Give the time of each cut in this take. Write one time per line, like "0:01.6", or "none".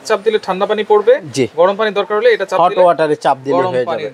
none